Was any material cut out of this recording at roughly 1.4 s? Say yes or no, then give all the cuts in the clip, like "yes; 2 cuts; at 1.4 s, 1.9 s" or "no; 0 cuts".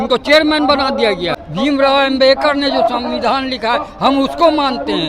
yes; 1 cut; at 1.4 s